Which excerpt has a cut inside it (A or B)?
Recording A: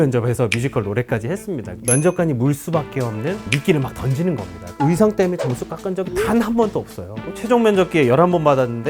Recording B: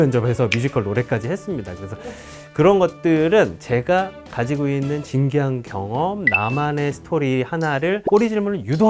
A